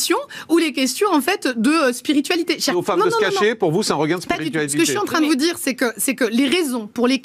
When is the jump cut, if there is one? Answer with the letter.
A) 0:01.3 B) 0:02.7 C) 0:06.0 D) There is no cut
B